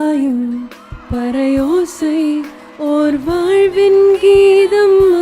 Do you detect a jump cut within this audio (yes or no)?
yes